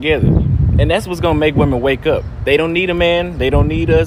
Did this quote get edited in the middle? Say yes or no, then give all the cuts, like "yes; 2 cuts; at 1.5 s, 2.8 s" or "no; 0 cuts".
no; 0 cuts